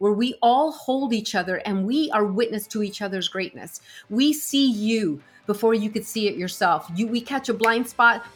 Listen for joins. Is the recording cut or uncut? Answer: uncut